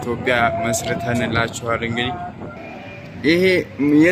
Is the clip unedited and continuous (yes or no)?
no